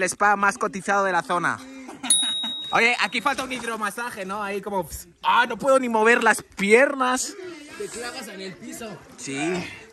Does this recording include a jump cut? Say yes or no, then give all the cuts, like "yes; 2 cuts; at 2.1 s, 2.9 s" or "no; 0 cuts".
no; 0 cuts